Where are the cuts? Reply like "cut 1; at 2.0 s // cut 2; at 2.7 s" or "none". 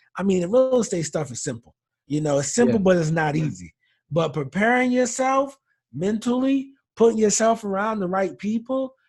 none

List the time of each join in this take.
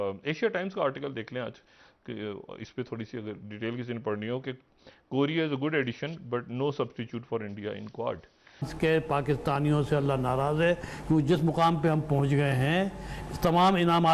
cut 1; at 8.7 s

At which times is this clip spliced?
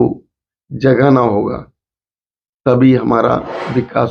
none

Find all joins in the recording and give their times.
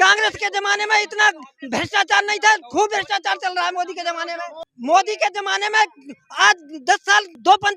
none

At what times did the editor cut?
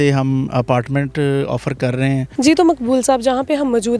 cut 1; at 2.3 s

